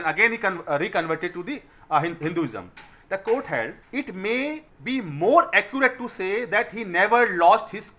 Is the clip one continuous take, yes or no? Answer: no